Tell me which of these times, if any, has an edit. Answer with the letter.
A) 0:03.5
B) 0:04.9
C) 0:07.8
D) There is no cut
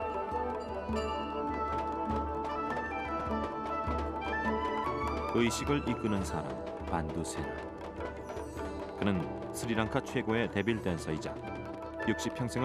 B